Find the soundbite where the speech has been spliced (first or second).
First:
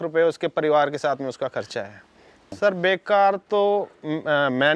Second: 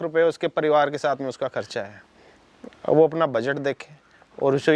first